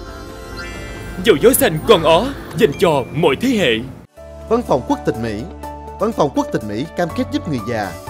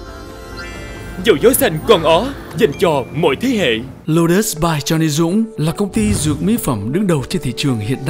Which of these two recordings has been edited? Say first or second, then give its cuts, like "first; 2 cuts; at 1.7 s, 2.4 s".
second; 1 cut; at 3.9 s